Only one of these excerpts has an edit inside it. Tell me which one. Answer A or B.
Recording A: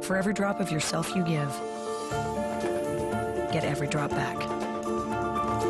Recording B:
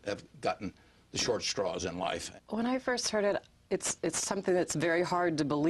B